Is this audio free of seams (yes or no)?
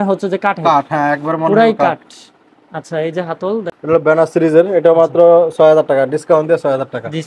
no